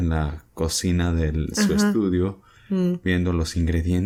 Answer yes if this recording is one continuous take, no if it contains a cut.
yes